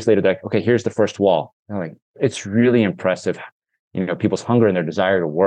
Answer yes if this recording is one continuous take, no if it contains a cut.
no